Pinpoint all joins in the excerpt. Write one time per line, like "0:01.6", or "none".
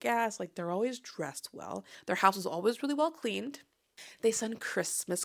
0:01.9
0:04.0